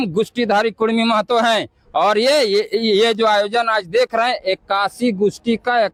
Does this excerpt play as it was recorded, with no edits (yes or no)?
yes